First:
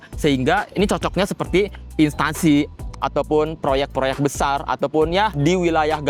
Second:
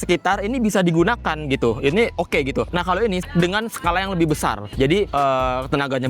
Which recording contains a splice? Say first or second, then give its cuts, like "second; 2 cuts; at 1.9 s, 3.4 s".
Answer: second; 1 cut; at 3.2 s